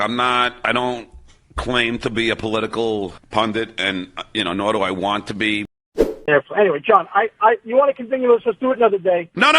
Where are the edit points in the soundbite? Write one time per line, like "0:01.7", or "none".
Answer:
0:06.2